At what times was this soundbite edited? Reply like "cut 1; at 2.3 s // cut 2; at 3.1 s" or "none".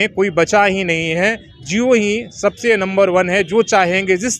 none